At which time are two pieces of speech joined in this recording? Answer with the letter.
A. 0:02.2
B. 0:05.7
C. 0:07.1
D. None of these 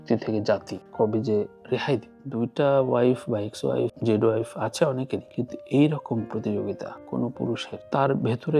A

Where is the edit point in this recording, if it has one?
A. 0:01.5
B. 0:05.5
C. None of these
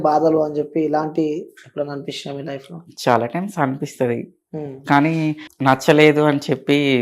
B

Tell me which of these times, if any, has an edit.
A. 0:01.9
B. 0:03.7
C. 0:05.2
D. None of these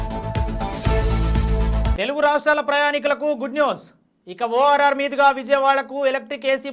A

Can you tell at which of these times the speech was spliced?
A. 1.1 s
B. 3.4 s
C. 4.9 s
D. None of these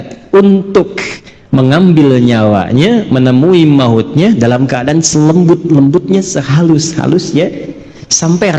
D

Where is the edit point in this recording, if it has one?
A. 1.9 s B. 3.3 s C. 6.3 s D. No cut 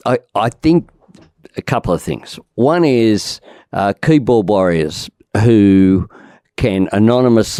D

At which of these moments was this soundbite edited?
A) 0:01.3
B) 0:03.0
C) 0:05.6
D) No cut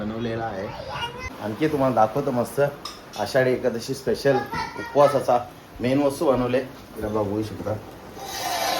A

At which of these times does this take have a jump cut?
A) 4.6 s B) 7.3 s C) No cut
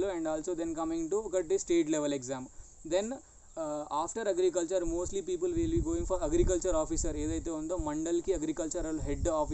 C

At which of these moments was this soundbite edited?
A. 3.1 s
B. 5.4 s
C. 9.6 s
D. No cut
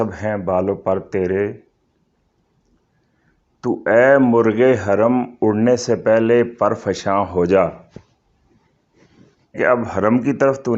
C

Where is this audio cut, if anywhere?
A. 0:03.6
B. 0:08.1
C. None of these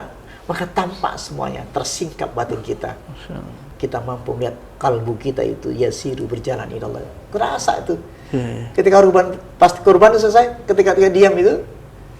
A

